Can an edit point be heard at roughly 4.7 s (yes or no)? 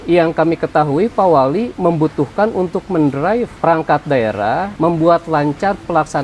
yes